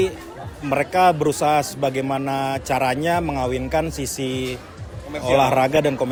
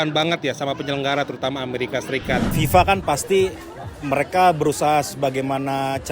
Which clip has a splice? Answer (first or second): second